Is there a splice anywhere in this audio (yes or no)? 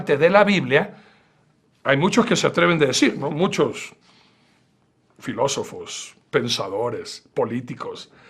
yes